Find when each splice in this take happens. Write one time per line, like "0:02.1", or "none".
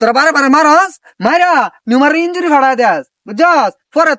none